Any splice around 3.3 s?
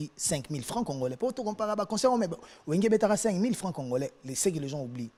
no; 0 cuts

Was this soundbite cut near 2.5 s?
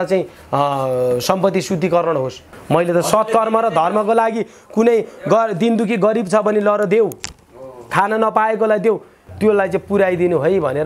yes; 2 cuts; at 2.5 s, 9.2 s

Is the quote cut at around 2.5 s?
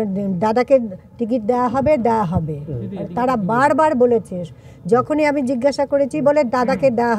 no; 0 cuts

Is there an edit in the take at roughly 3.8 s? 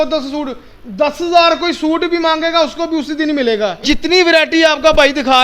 yes; 1 cut; at 3.8 s

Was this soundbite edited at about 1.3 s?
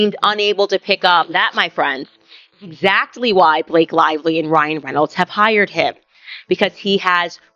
yes; 1 cut; at 1.3 s

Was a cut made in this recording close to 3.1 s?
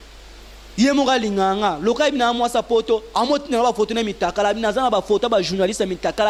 no; 0 cuts

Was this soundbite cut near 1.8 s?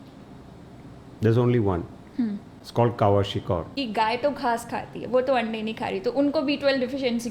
no; 1 cut; at 3.7 s

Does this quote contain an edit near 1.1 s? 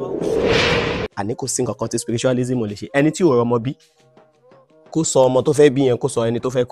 yes; 1 cut; at 1.1 s

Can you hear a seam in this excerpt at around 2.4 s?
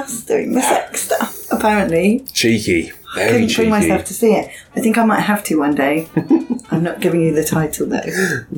no; 0 cuts

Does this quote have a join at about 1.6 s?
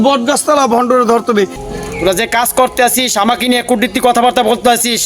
yes; 1 cut; at 1.6 s

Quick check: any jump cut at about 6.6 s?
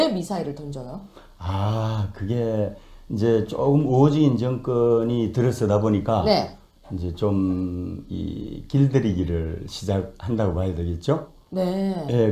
yes; 1 cut; at 6.6 s

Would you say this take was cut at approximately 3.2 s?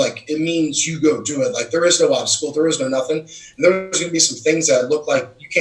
no; 0 cuts

